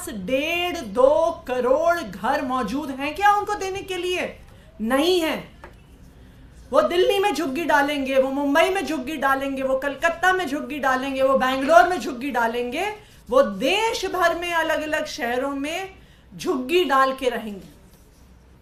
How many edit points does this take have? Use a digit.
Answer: 0